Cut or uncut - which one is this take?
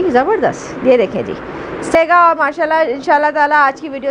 cut